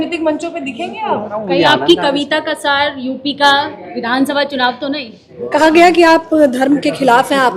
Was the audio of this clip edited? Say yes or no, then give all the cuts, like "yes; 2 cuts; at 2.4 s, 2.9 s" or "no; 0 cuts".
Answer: yes; 2 cuts; at 1.4 s, 5.3 s